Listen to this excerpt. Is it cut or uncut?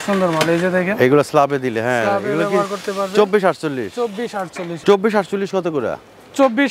cut